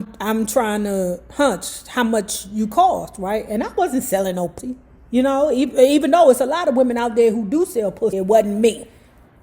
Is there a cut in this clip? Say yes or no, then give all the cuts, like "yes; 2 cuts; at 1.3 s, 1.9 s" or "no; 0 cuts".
yes; 2 cuts; at 4.6 s, 8.2 s